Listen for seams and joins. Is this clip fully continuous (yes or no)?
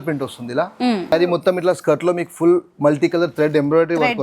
no